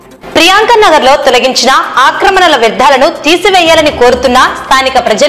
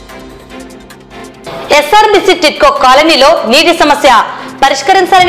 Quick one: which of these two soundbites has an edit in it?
second; 1 cut; at 1.4 s

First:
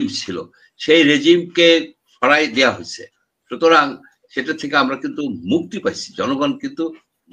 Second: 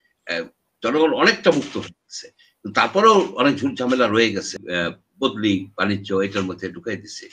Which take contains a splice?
second; 1 cut; at 4.6 s

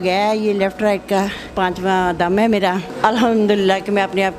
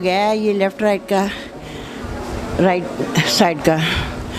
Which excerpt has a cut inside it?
first; 2 cuts; at 1.5 s, 2.9 s

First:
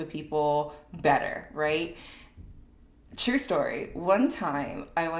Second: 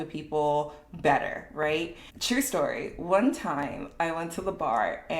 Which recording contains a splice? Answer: second; 1 cut; at 2.1 s

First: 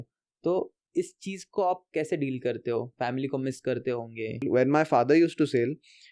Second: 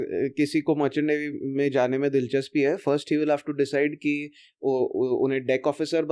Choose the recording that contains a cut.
first; 1 cut; at 4.4 s

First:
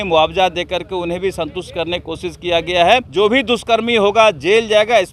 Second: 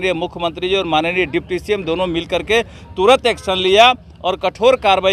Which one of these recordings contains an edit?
first; 1 cut; at 3.1 s

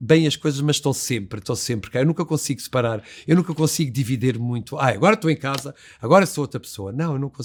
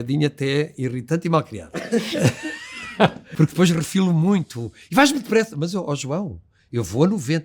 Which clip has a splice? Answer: second; 1 cut; at 3.2 s

